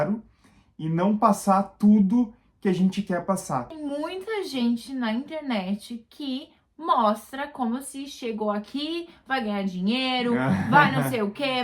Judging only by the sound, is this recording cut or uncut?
cut